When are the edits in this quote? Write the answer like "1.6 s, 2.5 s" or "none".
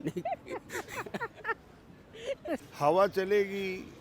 2.7 s